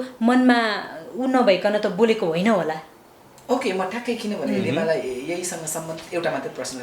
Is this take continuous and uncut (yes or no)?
yes